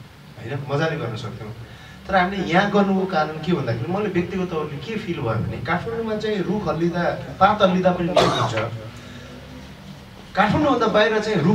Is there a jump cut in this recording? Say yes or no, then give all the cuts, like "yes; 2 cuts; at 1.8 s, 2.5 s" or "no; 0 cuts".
no; 0 cuts